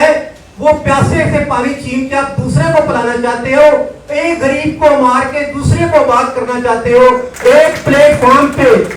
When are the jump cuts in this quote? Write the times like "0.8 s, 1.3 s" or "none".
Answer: 7.3 s

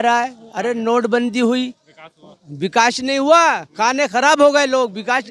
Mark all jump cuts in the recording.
none

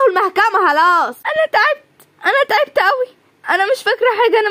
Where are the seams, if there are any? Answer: 1.2 s

